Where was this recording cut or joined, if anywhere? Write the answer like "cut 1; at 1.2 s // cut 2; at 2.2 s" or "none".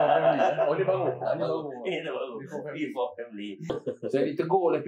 cut 1; at 3.8 s